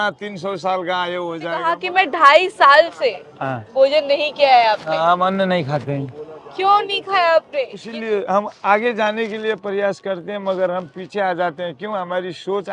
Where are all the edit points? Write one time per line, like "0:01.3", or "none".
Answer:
0:01.7
0:07.8